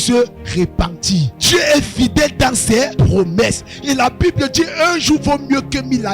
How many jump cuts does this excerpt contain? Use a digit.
2